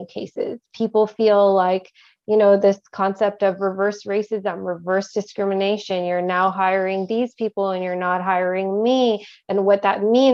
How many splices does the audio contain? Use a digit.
0